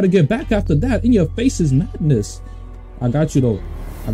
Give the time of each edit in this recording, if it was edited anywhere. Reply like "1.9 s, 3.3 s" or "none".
none